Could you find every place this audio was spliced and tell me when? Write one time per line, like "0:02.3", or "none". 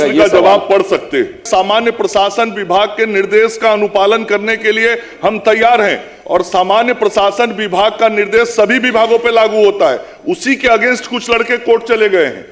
0:01.4